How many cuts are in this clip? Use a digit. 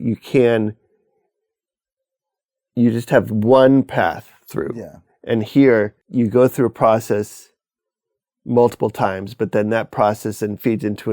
1